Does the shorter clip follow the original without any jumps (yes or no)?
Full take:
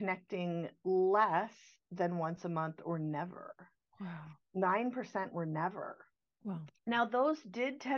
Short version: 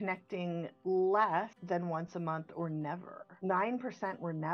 no